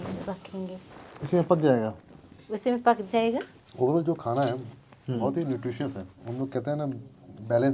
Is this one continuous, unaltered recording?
no; 3 cuts; at 1.0 s, 3.6 s, 6.3 s

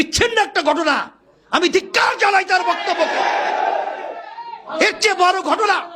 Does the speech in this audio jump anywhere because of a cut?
no; 0 cuts

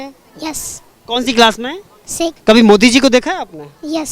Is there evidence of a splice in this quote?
yes; 1 cut; at 2.4 s

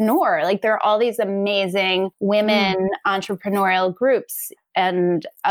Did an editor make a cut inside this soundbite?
yes; 1 cut; at 2.1 s

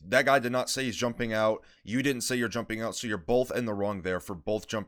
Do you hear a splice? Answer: no; 0 cuts

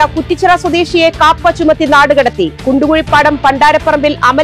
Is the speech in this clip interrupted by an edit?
no; 0 cuts

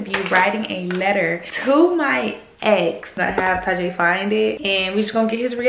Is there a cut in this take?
yes; 3 cuts; at 1.5 s, 3.1 s, 4.6 s

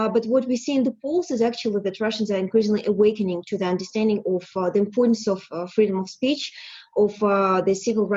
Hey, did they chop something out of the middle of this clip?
no; 0 cuts

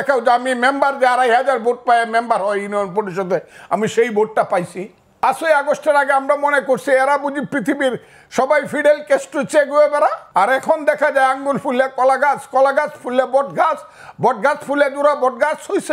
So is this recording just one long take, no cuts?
no; 2 cuts; at 5.2 s, 10.2 s

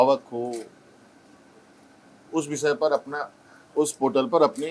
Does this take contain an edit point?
no; 0 cuts

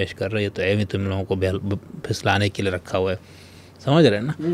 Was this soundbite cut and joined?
no; 0 cuts

